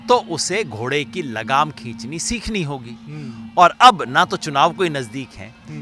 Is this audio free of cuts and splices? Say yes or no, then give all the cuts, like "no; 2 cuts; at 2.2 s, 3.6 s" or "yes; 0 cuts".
yes; 0 cuts